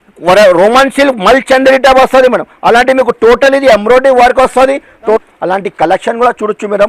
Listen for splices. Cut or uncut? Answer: cut